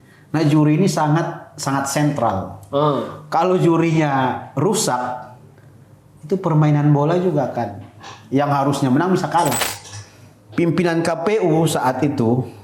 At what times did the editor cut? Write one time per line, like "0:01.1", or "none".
0:09.7

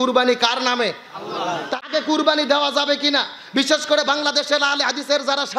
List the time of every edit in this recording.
0:01.7

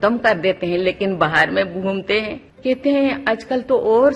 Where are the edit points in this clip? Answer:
0:02.4

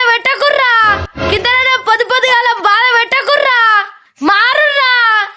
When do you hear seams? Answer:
0:01.1
0:03.8

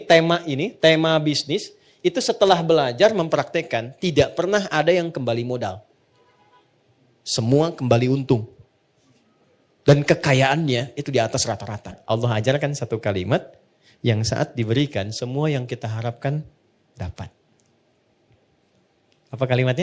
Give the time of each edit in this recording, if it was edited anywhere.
0:12.0

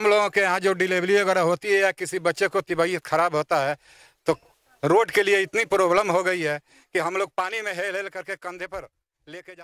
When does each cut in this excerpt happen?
none

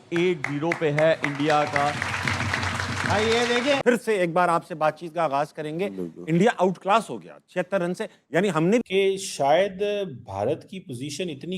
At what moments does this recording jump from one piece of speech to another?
0:03.8
0:08.8

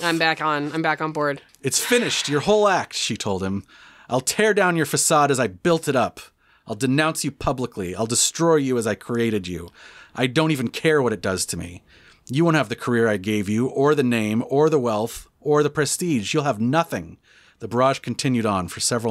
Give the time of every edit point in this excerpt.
0:01.5

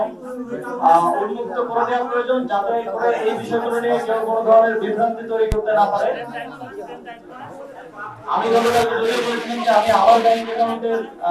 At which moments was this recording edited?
none

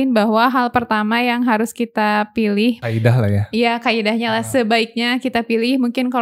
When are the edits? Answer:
0:02.8

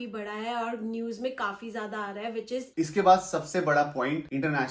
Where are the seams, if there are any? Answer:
0:02.7

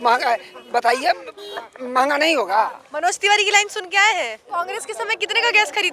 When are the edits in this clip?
0:04.5

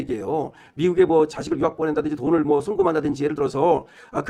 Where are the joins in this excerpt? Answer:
none

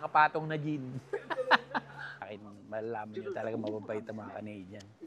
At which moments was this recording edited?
0:02.2

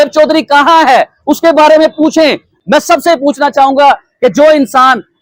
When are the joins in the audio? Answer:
none

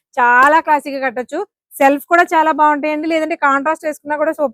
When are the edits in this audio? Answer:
none

